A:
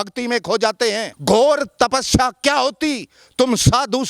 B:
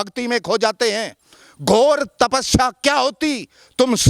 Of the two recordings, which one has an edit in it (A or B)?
A